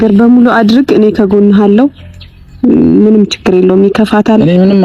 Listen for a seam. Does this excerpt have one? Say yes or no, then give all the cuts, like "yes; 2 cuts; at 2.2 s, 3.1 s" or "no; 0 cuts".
no; 0 cuts